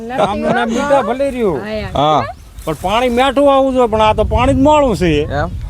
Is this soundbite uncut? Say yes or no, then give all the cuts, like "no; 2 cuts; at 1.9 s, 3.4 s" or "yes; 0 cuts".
yes; 0 cuts